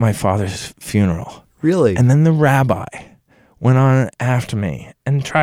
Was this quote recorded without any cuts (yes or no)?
yes